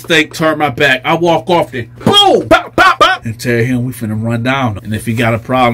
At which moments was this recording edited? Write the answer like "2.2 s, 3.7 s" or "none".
3.2 s